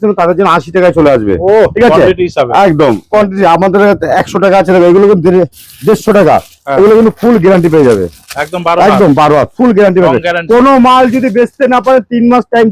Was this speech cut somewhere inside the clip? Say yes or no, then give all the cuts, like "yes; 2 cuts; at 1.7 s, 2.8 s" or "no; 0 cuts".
no; 0 cuts